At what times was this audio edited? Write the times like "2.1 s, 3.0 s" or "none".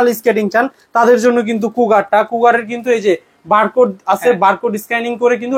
none